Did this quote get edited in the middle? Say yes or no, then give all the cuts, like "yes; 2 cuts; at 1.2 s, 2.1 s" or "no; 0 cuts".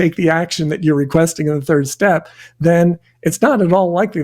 yes; 1 cut; at 1.1 s